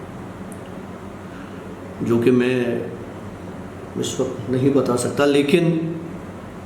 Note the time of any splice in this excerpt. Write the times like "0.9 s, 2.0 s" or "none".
none